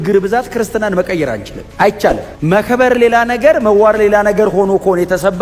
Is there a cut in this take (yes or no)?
no